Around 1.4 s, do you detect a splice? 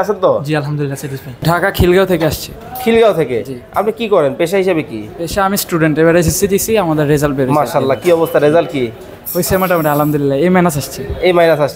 yes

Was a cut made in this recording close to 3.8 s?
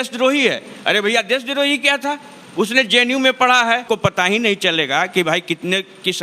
yes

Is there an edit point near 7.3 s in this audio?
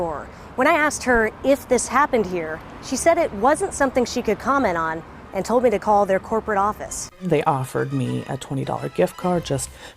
yes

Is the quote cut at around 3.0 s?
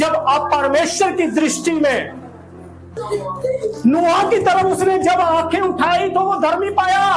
yes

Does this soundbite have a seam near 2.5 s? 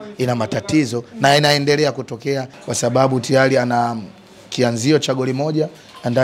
yes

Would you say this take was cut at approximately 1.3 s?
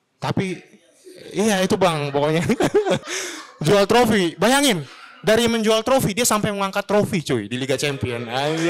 no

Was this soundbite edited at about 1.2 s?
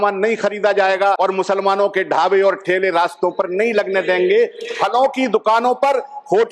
yes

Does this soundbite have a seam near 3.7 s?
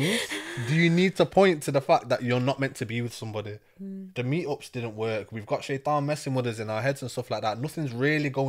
no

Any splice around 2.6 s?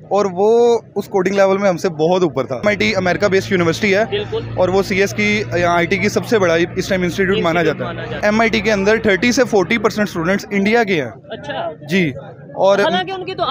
yes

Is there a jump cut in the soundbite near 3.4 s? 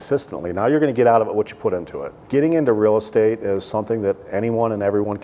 no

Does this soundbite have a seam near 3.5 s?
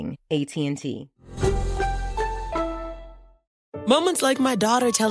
yes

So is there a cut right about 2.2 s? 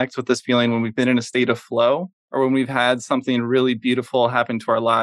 yes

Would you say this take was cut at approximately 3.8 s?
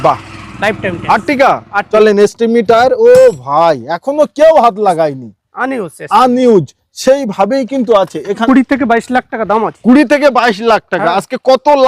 no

